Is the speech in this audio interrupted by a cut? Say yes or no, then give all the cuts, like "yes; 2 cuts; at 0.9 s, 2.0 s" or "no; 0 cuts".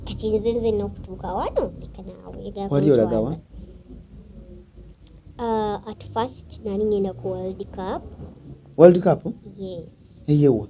no; 0 cuts